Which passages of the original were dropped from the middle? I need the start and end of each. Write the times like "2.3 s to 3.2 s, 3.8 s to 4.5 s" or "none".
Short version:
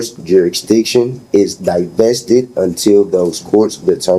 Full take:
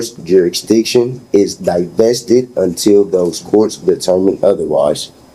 none